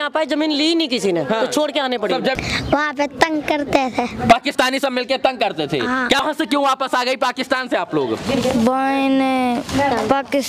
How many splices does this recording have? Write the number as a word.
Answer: two